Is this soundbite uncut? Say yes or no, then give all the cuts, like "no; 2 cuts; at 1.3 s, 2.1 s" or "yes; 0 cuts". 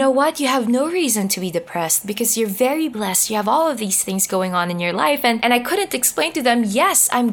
yes; 0 cuts